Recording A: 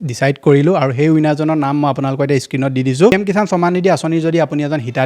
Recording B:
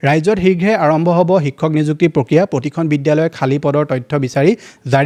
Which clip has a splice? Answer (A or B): A